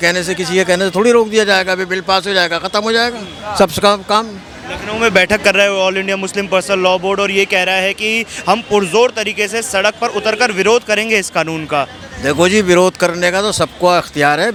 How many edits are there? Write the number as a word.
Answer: zero